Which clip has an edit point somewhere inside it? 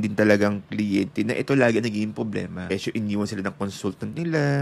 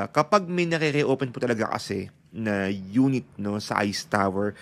first; 1 cut; at 2.7 s

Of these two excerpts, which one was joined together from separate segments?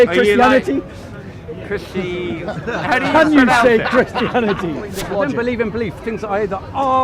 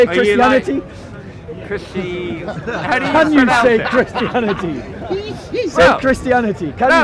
first; 1 cut; at 5.0 s

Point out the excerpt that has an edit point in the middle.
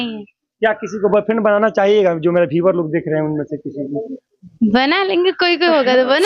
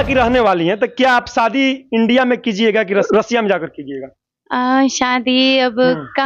second; 1 cut; at 3.1 s

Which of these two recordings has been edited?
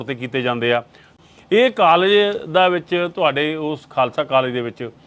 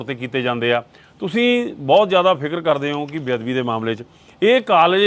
first; 1 cut; at 1.2 s

